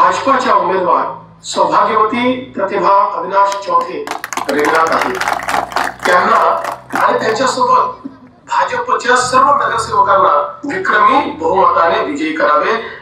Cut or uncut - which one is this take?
uncut